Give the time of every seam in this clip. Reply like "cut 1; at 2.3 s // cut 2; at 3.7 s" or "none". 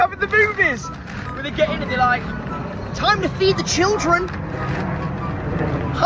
none